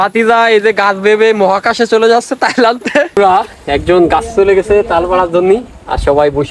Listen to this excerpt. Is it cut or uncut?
cut